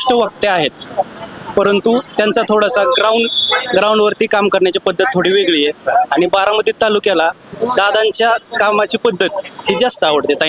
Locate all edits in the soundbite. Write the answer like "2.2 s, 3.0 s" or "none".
none

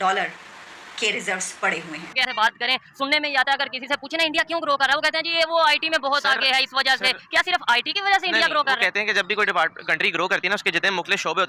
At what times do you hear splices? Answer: 2.2 s

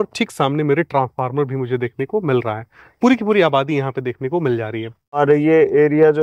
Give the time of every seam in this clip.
5.2 s

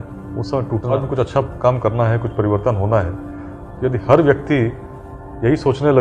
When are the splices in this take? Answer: 0.9 s

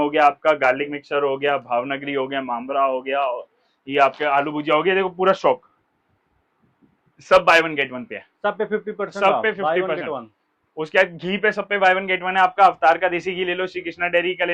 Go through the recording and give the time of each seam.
none

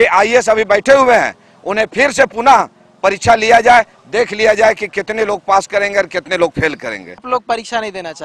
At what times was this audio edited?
7.2 s

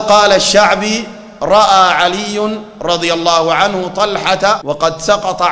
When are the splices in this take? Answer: 4.6 s

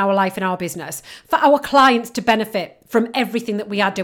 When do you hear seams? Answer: none

